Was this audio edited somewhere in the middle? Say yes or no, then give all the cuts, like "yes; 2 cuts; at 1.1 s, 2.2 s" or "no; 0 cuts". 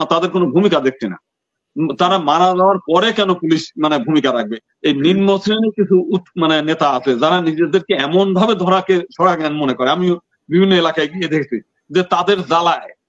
yes; 1 cut; at 4.5 s